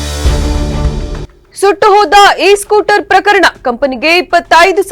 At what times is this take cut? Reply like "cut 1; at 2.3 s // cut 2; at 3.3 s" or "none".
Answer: cut 1; at 1.3 s

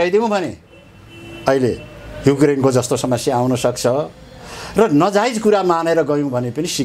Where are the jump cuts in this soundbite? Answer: none

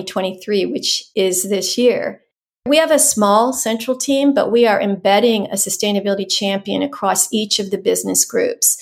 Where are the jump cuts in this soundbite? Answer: cut 1; at 1.0 s // cut 2; at 2.6 s

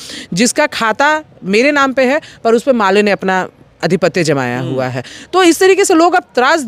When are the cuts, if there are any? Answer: none

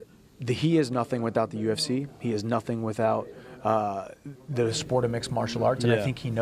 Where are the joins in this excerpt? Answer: none

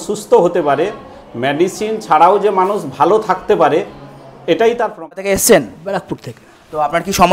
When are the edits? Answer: cut 1; at 5.1 s

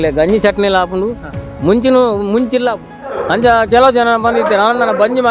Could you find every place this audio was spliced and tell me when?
cut 1; at 3.2 s

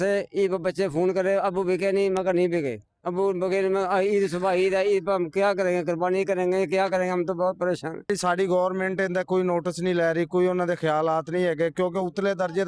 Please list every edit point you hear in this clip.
cut 1; at 8.1 s

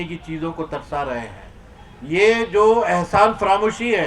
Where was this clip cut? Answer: none

